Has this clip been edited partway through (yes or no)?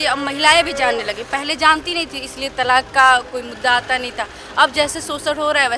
no